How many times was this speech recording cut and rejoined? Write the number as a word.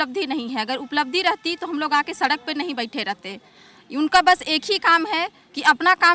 zero